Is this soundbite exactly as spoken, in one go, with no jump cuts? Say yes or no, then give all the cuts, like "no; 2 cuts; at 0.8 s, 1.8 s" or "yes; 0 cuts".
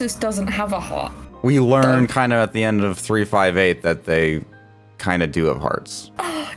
no; 1 cut; at 1.2 s